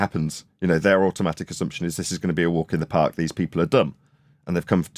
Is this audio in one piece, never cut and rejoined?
yes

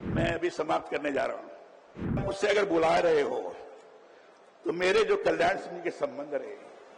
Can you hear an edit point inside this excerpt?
yes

